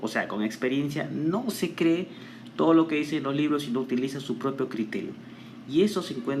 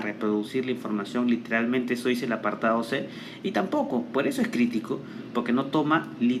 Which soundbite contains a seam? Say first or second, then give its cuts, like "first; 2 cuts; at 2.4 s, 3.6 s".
second; 1 cut; at 4.7 s